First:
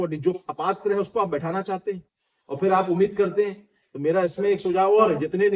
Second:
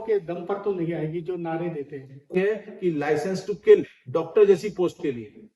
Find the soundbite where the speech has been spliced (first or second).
second